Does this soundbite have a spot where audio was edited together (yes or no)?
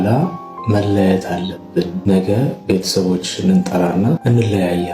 yes